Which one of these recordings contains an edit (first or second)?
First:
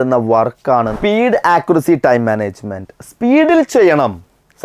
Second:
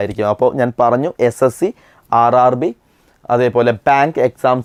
first